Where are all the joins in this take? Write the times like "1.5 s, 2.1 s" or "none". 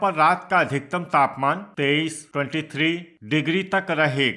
1.7 s, 3.1 s